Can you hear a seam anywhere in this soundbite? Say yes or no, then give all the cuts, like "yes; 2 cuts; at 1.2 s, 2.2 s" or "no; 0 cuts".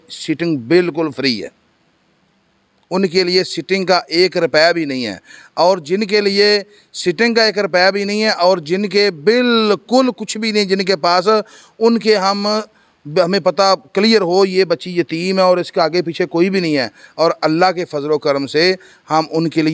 no; 0 cuts